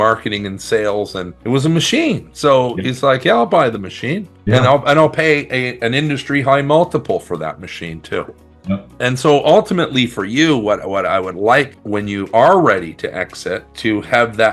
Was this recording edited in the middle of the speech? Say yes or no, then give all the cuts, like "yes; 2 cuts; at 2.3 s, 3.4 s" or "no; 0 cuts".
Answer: no; 0 cuts